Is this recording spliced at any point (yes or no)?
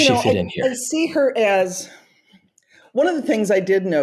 no